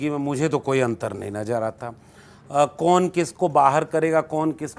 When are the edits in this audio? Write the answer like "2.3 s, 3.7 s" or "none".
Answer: none